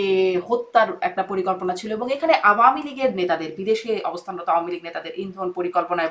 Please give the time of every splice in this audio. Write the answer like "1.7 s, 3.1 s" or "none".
none